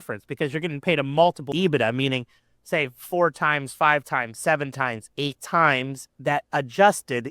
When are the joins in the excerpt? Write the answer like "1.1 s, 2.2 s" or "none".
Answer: 1.4 s, 6.1 s